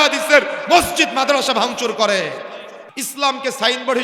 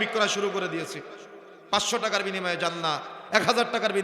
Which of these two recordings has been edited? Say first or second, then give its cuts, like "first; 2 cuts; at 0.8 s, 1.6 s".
first; 1 cut; at 3.0 s